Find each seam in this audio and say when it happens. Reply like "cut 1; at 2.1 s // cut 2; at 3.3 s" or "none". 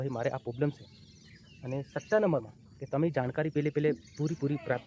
none